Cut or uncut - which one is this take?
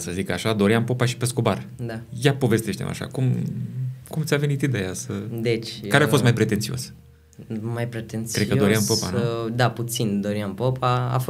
uncut